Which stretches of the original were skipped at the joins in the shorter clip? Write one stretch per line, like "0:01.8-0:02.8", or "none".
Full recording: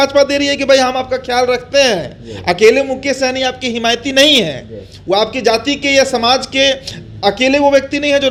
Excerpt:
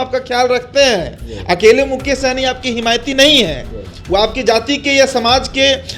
none